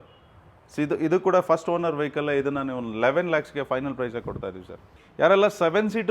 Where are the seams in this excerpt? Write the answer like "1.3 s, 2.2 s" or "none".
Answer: 5.0 s